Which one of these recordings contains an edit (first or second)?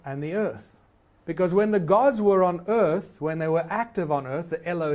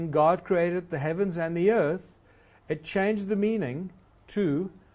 first